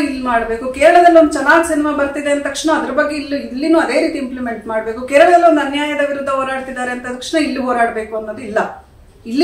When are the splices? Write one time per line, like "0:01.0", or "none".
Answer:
none

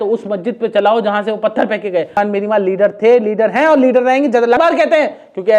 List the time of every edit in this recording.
0:02.1
0:04.6

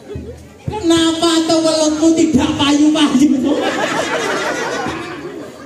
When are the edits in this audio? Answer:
none

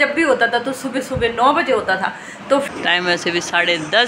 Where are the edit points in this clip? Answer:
0:02.7

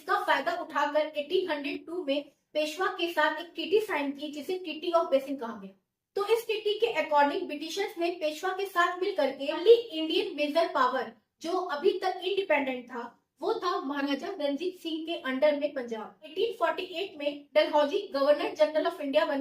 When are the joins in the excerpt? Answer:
0:09.6
0:16.2

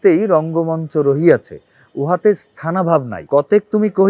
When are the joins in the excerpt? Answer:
0:03.2

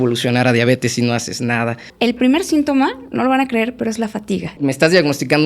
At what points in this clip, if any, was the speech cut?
0:01.9
0:04.5

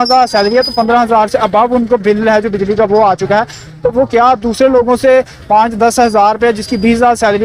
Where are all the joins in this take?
none

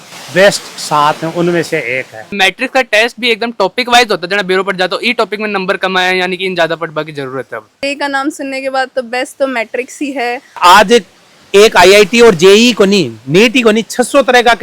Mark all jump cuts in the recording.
0:02.3
0:07.8
0:10.6

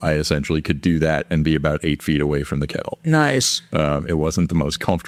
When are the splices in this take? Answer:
none

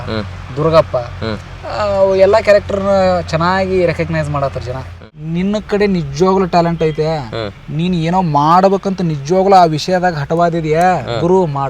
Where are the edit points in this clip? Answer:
0:05.1

